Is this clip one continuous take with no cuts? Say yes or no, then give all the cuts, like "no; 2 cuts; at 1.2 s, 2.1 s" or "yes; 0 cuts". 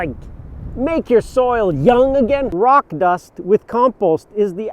no; 1 cut; at 2.5 s